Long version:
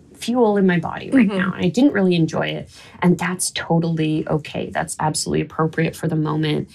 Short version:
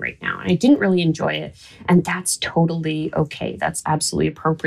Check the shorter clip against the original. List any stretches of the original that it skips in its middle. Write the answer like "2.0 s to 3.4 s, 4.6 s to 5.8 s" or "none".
none